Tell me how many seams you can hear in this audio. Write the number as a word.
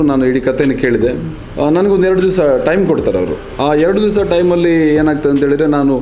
two